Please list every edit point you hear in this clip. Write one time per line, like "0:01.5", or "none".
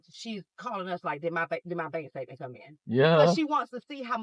none